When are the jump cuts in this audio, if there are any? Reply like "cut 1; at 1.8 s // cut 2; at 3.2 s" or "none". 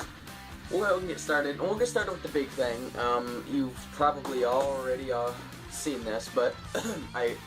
cut 1; at 3.8 s